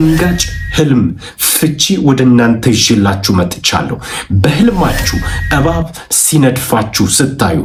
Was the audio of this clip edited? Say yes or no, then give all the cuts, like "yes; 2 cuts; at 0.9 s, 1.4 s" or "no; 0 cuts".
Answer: no; 0 cuts